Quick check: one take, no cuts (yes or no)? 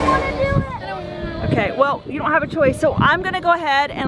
yes